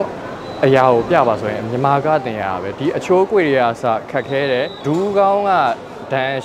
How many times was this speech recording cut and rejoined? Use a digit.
1